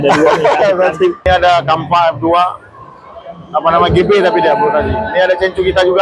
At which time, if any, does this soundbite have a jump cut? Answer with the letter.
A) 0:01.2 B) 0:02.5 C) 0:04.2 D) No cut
A